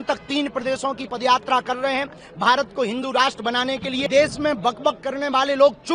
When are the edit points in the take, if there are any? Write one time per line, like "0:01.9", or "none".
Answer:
0:04.0